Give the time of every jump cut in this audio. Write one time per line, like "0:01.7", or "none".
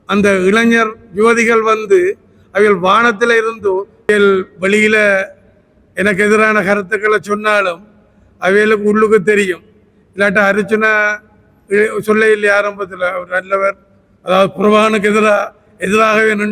0:04.1